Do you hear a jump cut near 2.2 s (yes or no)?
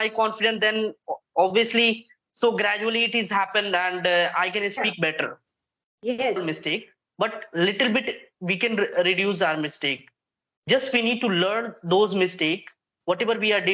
no